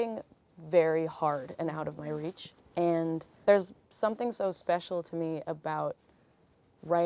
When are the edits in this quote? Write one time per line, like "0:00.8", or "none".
none